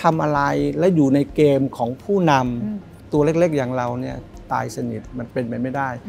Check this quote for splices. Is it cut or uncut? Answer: uncut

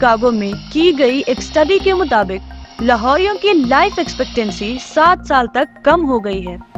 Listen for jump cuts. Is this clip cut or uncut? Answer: uncut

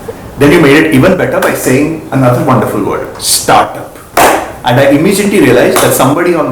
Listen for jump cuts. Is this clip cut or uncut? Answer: uncut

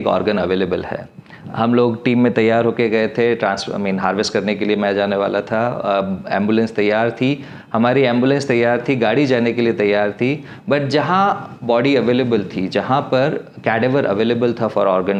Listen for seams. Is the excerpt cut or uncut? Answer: uncut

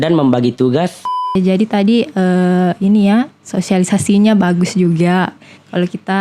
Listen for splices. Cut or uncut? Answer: cut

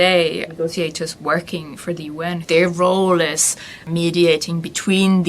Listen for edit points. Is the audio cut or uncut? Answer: cut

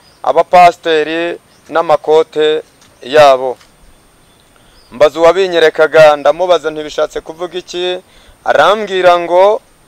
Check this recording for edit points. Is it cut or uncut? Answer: uncut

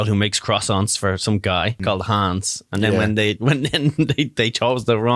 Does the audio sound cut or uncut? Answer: cut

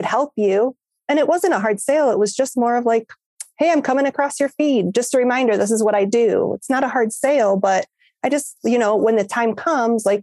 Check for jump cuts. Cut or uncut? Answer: uncut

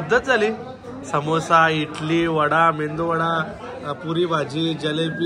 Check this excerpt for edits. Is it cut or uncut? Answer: uncut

